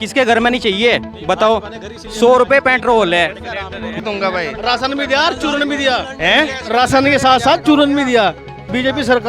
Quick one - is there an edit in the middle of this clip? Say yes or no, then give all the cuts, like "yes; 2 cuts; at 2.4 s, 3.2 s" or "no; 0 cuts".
yes; 1 cut; at 3.8 s